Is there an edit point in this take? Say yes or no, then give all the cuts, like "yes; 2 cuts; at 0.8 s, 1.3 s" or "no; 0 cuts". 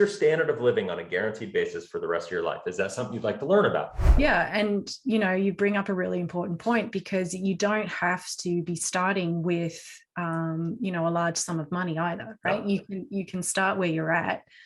yes; 1 cut; at 4.0 s